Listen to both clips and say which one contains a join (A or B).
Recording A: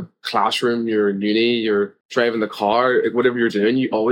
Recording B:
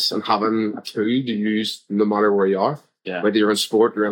A